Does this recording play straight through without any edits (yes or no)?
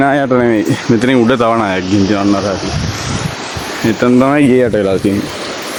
yes